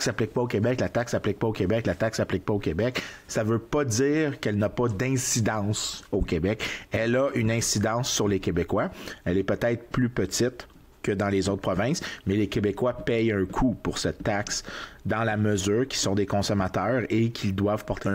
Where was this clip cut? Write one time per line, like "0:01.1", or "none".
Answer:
none